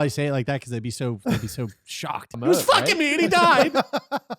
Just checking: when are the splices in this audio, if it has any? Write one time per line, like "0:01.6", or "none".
0:02.3
0:03.6